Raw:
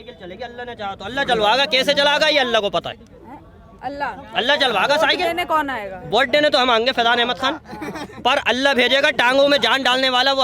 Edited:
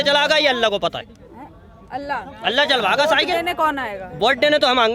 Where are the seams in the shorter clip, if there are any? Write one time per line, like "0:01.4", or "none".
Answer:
none

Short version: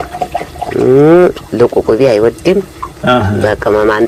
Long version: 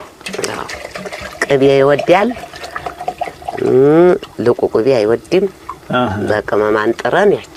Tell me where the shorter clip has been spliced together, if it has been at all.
none

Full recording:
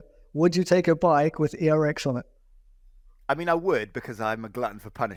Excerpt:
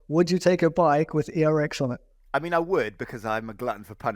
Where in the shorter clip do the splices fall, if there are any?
0:02.1

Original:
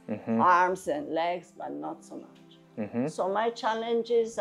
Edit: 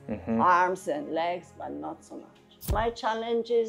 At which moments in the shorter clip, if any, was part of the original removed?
0:02.7

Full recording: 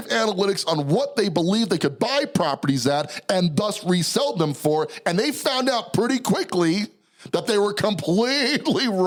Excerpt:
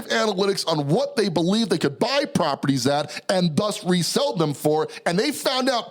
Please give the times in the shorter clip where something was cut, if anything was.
none

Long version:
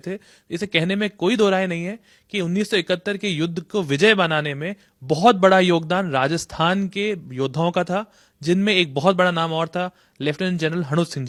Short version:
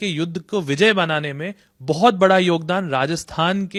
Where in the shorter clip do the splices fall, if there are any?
none

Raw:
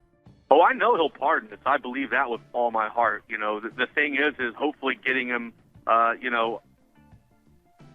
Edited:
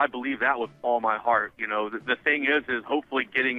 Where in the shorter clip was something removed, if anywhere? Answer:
none

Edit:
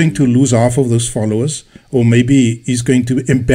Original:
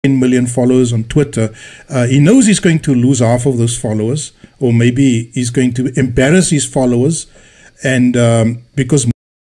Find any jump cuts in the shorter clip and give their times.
none

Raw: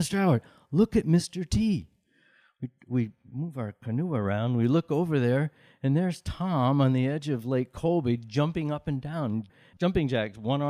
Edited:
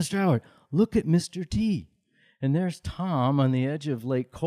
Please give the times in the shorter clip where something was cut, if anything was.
0:02.2

